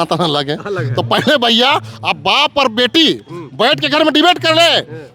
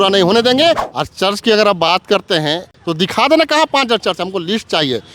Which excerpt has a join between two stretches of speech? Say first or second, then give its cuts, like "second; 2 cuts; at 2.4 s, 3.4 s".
second; 2 cuts; at 0.9 s, 2.7 s